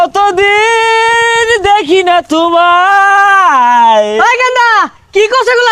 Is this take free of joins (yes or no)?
yes